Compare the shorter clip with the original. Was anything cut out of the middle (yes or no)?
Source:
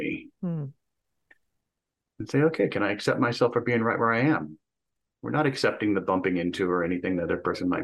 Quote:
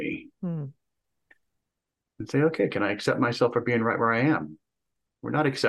no